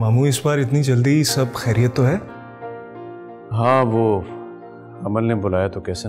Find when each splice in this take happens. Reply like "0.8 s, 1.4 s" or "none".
none

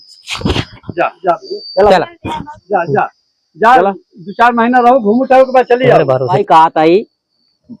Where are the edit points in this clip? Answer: 6.3 s

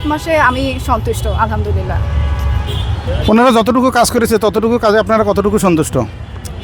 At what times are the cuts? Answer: none

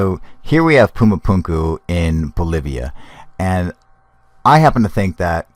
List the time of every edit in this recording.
1.4 s

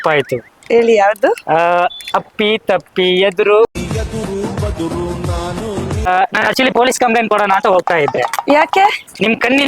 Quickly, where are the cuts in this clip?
6.1 s

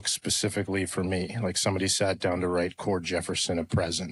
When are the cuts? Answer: none

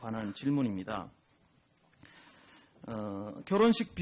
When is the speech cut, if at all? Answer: 2.8 s

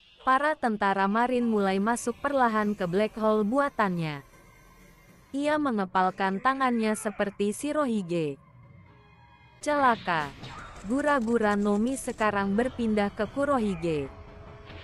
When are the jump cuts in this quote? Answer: none

